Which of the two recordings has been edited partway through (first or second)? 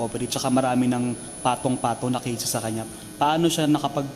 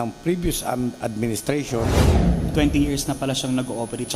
second